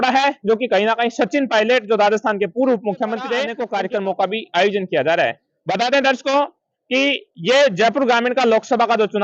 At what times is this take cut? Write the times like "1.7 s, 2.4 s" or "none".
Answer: 3.6 s

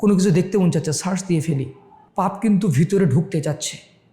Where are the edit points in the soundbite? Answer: 2.0 s

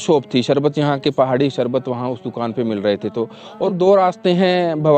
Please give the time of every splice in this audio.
3.7 s

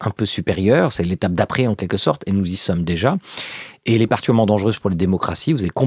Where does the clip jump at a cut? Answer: none

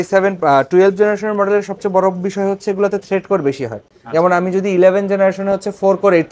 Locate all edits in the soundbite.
none

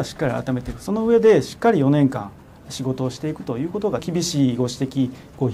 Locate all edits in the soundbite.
4.0 s

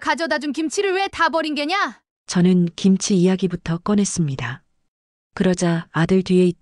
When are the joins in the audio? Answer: none

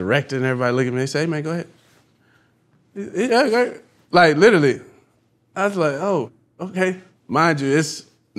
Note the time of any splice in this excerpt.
7.1 s

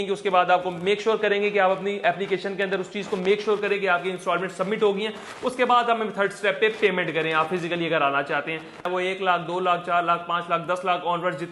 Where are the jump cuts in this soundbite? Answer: 8.9 s

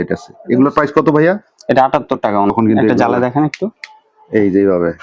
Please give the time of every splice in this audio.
2.5 s

